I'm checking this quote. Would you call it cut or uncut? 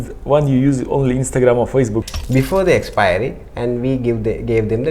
cut